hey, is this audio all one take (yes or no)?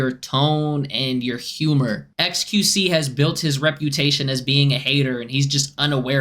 no